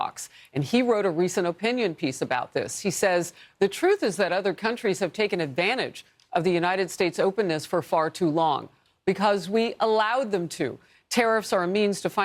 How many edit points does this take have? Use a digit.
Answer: 0